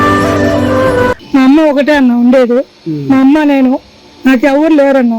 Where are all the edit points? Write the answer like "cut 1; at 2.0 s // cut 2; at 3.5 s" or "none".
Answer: cut 1; at 1.2 s